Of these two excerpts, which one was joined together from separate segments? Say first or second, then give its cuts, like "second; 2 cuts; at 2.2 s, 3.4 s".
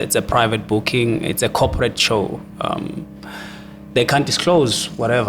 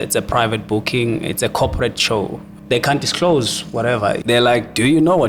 second; 2 cuts; at 2.5 s, 4.2 s